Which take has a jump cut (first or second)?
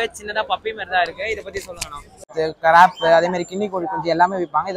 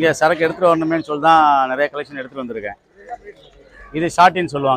first